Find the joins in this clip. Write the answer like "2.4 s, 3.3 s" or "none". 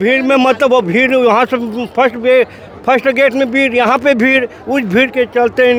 none